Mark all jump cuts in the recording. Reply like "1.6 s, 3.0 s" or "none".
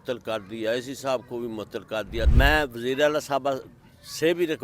2.3 s